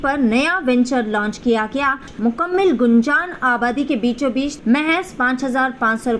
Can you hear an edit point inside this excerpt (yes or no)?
yes